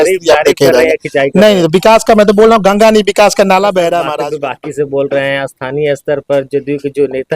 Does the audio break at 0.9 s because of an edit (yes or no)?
no